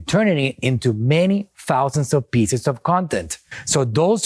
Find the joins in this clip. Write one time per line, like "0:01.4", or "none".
none